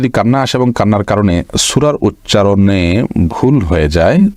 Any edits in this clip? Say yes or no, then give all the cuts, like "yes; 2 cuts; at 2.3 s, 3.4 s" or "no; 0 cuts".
no; 0 cuts